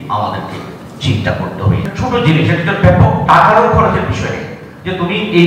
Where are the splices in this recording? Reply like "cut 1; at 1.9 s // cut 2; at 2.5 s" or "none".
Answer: cut 1; at 1.8 s